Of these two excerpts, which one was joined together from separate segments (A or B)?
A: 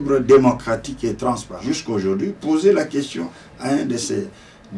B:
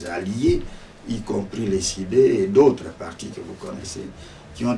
A